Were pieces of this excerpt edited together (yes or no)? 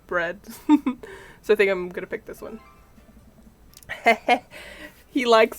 no